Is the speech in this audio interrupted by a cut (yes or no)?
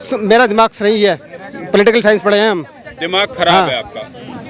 no